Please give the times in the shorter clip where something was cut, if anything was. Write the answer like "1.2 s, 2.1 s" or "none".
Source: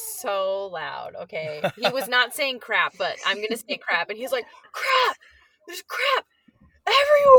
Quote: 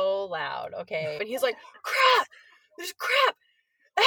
1.2 s